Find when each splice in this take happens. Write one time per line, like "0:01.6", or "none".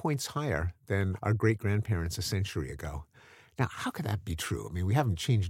0:01.2